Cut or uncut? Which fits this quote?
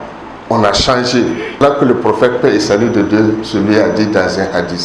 cut